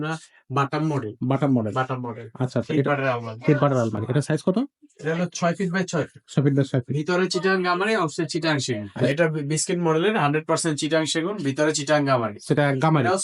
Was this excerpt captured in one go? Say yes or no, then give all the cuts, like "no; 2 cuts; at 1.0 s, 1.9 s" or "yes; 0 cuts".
no; 1 cut; at 8.9 s